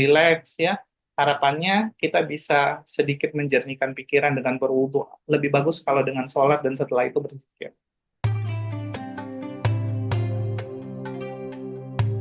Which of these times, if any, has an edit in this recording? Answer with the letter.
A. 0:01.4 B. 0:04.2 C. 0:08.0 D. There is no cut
C